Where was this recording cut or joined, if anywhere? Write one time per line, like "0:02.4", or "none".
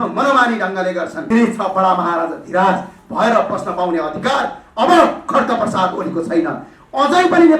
0:01.2